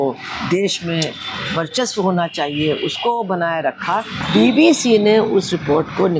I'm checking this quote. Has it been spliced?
yes; 1 cut; at 4.1 s

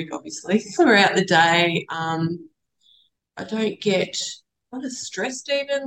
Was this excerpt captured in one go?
yes; 0 cuts

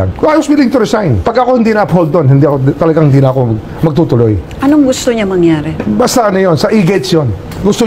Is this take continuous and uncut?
yes; 0 cuts

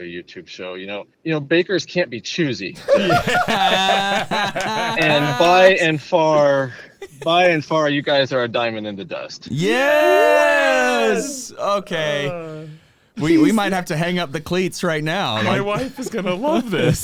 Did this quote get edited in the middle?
no; 0 cuts

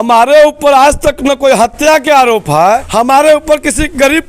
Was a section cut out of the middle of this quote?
yes; 1 cut; at 2.9 s

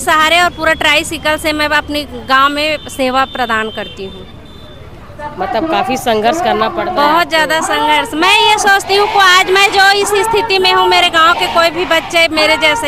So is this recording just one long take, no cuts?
yes; 0 cuts

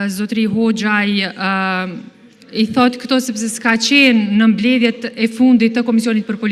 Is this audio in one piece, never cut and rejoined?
yes; 0 cuts

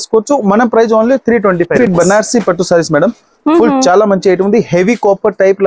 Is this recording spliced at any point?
yes; 1 cut; at 1.8 s

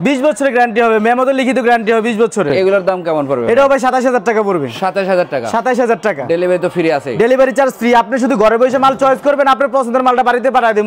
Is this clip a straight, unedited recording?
yes; 0 cuts

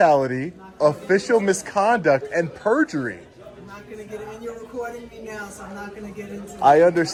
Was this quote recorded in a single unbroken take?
yes; 0 cuts

